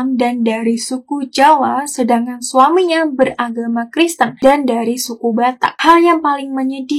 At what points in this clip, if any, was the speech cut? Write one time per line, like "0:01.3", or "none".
0:05.8